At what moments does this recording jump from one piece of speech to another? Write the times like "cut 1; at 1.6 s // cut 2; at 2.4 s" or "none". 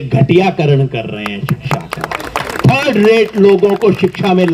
none